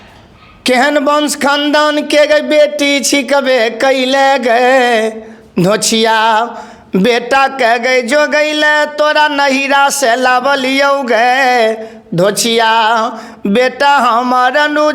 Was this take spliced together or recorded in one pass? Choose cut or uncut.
uncut